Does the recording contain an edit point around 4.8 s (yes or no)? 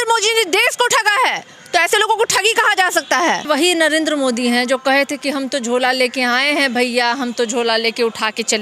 no